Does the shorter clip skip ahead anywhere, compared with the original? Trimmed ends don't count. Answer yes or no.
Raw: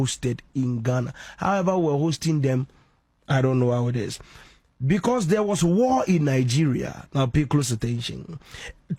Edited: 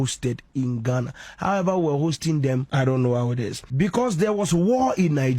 yes